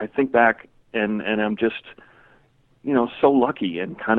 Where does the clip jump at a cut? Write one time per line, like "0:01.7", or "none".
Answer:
none